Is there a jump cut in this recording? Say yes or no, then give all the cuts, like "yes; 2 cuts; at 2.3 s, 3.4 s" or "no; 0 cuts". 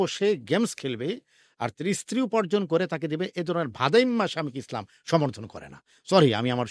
no; 0 cuts